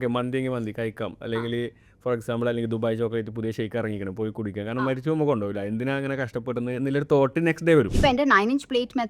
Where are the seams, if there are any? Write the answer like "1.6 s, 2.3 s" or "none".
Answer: 7.9 s

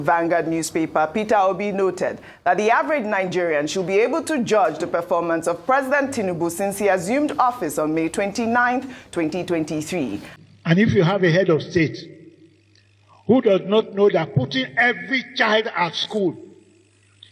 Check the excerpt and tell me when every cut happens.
10.3 s

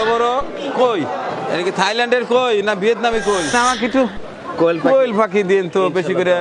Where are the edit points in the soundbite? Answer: 1.4 s, 3.5 s

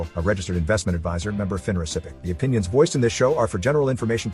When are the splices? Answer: 2.1 s

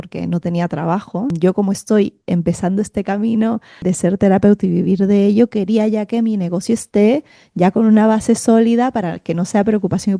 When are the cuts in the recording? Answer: 1.3 s, 3.8 s

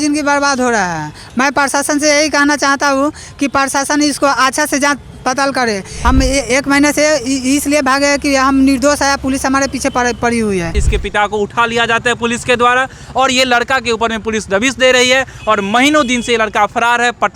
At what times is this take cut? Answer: 5.9 s, 10.8 s

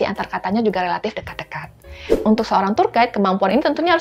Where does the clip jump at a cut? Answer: 2.2 s

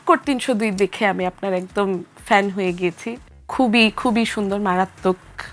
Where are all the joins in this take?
none

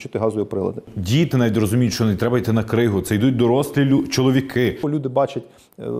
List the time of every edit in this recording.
1.0 s, 4.8 s

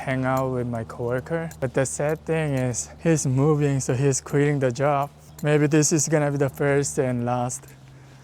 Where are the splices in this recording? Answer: 1.5 s, 2.9 s, 5.2 s

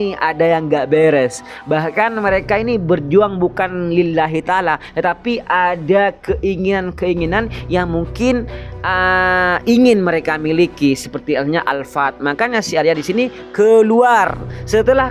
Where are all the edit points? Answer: none

